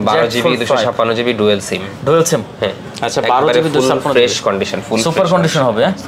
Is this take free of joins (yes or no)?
yes